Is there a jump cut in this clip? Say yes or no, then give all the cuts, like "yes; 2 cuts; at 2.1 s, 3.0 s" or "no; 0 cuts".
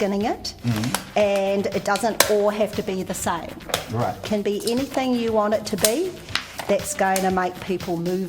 yes; 1 cut; at 4.2 s